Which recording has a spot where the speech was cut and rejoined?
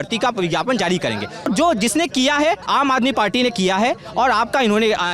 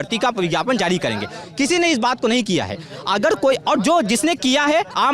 first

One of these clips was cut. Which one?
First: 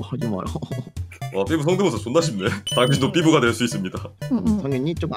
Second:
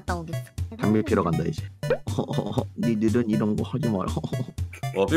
second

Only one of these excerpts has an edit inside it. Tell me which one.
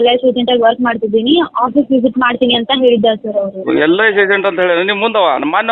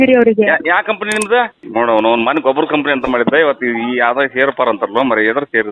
second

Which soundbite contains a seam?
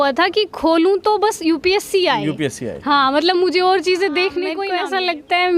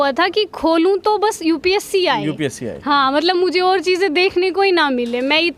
first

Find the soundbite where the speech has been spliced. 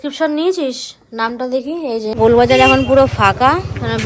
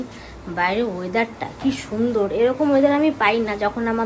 first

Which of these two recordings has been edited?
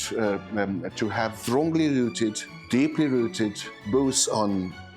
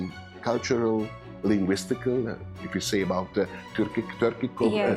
first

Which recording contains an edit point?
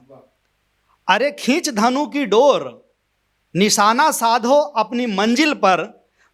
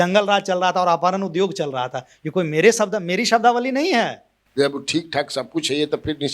second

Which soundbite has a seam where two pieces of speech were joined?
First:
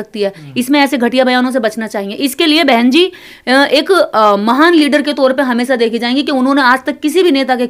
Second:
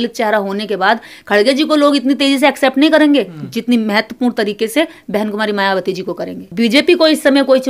second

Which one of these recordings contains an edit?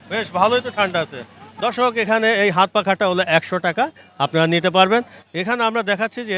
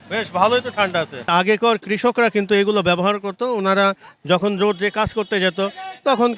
second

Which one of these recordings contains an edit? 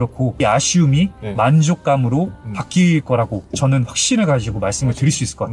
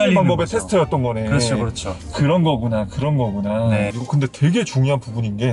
second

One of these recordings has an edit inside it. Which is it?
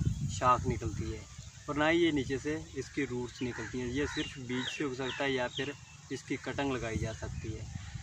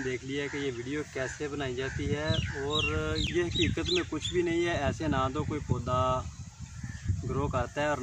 second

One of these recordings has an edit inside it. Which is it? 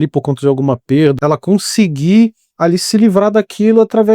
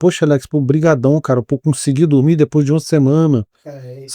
first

